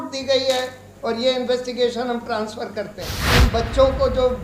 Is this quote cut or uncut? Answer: cut